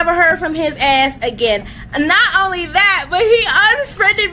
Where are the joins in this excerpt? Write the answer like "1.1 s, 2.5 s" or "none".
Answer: none